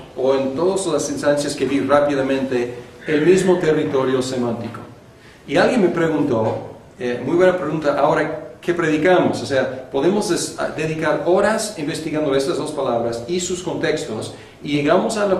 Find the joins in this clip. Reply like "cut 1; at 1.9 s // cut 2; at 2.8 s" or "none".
cut 1; at 3.8 s

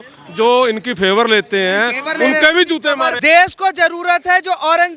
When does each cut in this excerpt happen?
cut 1; at 3.2 s

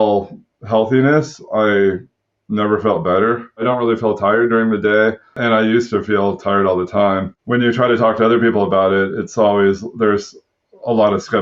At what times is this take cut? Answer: cut 1; at 3.6 s // cut 2; at 5.4 s // cut 3; at 7.3 s

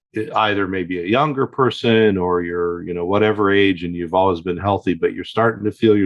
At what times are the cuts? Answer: none

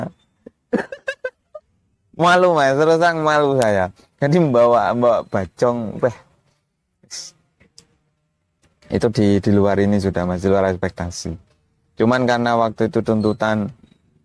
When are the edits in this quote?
none

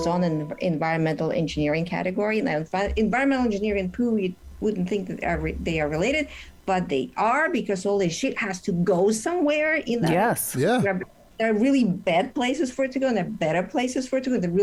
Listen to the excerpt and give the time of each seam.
none

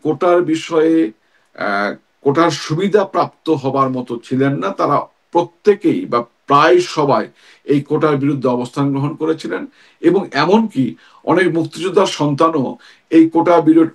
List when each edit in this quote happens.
none

